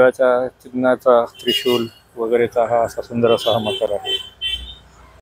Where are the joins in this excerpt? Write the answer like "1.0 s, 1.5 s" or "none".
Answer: none